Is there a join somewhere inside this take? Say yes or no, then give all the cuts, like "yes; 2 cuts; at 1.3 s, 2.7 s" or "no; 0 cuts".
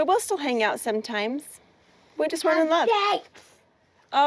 no; 0 cuts